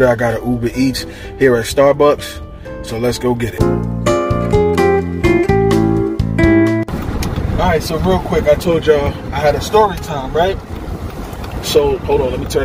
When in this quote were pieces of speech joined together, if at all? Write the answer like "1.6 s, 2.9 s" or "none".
none